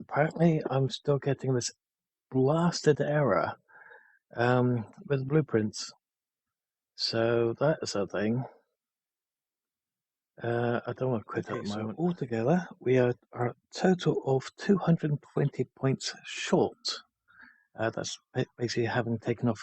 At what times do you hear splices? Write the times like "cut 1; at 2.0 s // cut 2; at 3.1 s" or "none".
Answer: cut 1; at 11.9 s